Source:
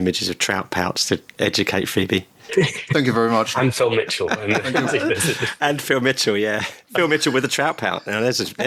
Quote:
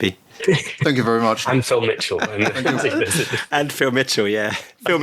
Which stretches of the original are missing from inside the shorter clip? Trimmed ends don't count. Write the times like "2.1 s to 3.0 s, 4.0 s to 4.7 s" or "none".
none